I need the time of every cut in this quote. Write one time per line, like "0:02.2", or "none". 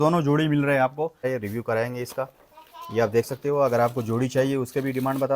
0:01.3